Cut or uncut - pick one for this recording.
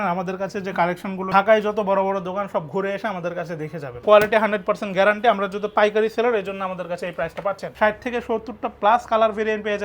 cut